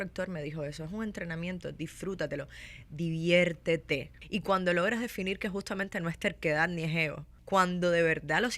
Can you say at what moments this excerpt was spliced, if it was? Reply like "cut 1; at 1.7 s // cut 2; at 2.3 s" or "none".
cut 1; at 4.2 s // cut 2; at 7.3 s

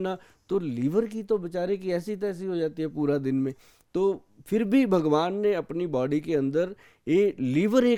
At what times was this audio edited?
none

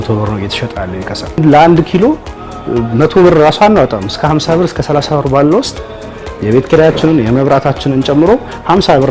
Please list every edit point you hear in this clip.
cut 1; at 1.4 s

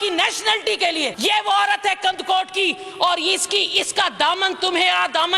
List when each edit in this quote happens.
cut 1; at 1.1 s

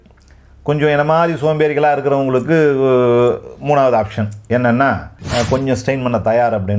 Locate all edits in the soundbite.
cut 1; at 5.1 s

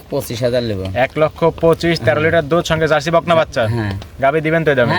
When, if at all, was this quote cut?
none

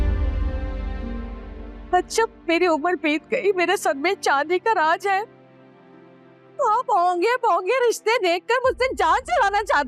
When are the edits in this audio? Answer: none

